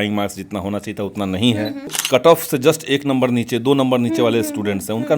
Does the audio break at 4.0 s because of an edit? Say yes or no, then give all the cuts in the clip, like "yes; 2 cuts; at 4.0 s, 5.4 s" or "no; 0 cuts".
no; 1 cut; at 2.0 s